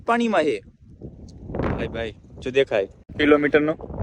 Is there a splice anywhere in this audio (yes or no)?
yes